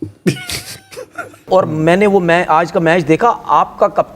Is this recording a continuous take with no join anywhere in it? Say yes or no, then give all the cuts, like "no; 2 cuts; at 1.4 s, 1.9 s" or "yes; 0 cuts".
no; 1 cut; at 1.5 s